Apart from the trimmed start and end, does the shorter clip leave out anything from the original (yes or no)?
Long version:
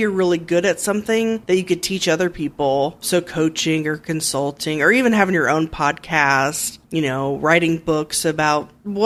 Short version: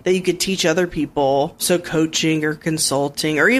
no